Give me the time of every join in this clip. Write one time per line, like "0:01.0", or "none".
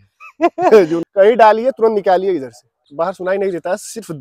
0:01.0
0:02.8